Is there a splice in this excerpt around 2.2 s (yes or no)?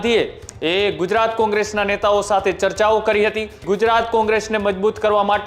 no